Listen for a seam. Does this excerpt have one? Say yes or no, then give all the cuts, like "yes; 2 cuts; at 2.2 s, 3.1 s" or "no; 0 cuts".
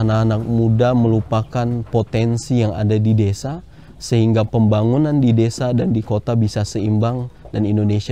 no; 0 cuts